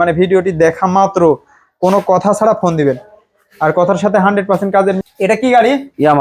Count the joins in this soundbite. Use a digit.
1